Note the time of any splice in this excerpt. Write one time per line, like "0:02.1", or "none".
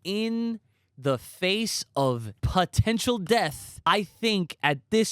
0:02.3
0:03.9